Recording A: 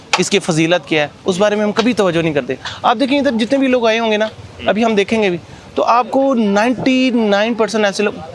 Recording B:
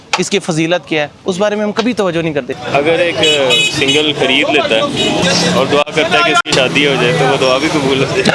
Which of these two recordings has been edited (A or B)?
B